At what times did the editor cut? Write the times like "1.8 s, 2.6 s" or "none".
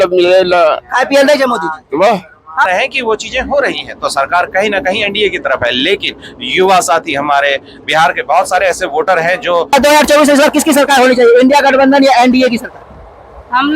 2.7 s, 9.7 s